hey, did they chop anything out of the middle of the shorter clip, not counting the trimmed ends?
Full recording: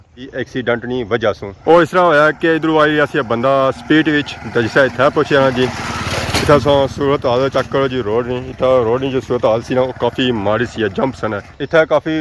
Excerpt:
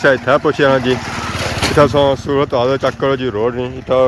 no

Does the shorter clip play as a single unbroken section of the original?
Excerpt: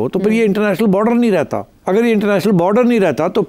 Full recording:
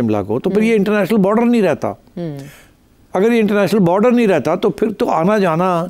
no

